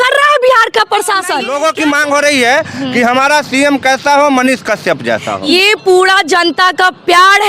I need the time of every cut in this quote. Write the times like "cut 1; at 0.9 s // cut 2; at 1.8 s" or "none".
cut 1; at 1.4 s // cut 2; at 5.5 s